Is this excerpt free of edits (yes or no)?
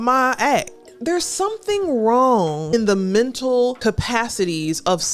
no